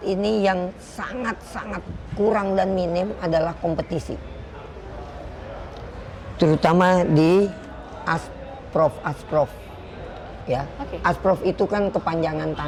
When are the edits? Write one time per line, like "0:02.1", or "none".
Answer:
none